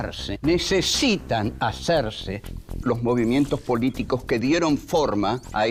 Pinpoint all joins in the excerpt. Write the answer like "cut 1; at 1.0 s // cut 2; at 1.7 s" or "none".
none